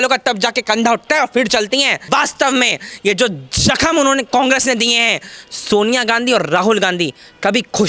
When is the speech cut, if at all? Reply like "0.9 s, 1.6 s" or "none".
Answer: 2.0 s